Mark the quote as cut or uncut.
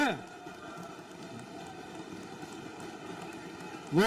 uncut